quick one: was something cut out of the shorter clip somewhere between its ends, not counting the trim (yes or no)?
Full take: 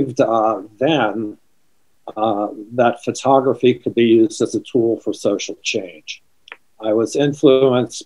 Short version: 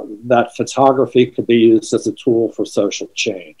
no